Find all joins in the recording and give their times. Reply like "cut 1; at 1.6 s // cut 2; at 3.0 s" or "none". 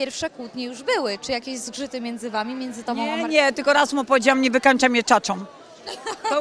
none